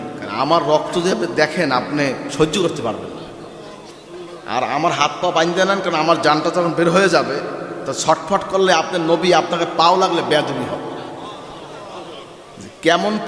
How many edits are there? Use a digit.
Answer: 0